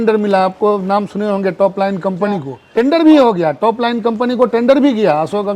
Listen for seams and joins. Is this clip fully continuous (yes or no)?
no